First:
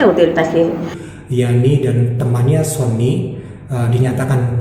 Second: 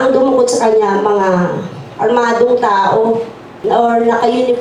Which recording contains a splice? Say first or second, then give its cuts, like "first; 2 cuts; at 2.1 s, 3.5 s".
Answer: first; 1 cut; at 1.0 s